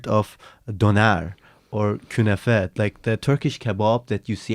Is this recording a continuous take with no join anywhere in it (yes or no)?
yes